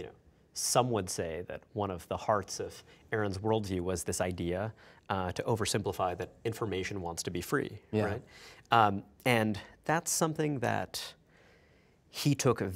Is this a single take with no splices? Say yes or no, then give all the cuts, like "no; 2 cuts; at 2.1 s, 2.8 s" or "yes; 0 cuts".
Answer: yes; 0 cuts